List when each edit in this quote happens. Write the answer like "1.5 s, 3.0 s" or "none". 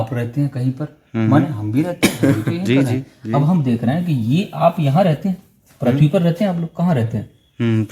none